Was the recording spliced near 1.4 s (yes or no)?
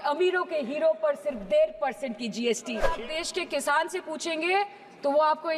no